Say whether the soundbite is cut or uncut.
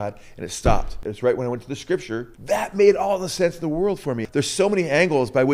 cut